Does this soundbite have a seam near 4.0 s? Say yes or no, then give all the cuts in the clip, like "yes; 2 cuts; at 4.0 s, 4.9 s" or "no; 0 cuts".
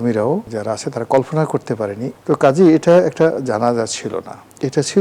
no; 1 cut; at 2.1 s